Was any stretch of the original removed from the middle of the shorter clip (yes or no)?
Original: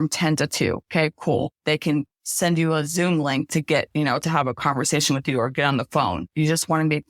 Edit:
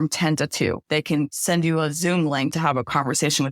yes